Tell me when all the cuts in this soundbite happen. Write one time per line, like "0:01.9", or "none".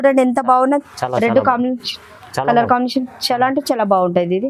none